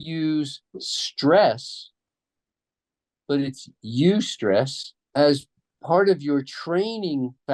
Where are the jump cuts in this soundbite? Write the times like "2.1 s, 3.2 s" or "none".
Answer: none